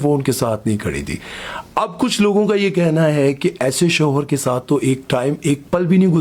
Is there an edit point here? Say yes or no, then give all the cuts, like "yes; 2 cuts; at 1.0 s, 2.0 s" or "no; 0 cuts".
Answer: no; 0 cuts